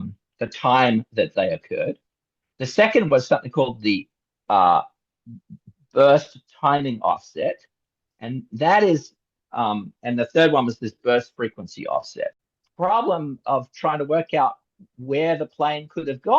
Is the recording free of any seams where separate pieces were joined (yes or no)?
no